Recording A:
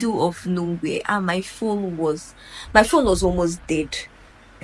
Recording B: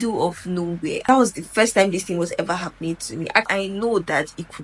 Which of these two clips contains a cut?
B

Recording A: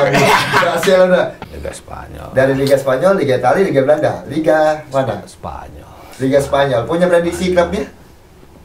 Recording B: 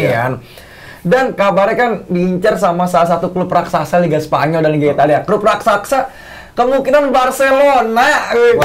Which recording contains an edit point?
A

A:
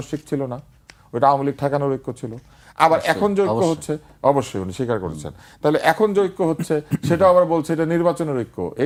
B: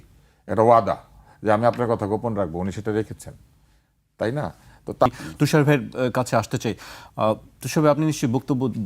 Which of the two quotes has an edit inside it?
B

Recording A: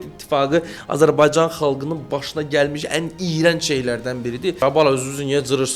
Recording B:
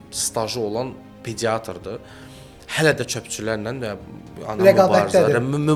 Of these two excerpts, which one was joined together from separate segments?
A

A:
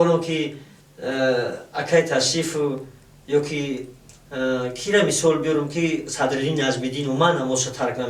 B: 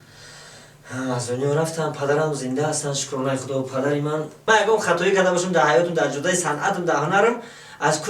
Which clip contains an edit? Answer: B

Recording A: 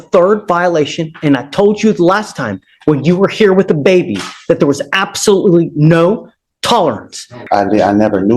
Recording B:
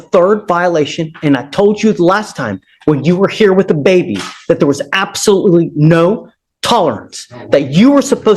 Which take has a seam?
A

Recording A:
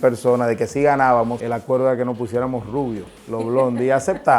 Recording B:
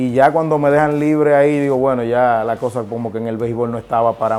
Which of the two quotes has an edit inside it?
A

